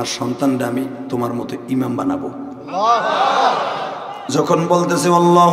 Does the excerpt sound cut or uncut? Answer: cut